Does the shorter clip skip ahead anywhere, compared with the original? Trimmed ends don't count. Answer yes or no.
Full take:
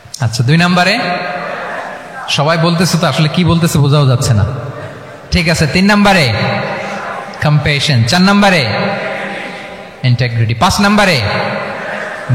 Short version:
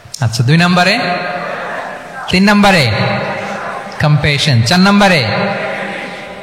yes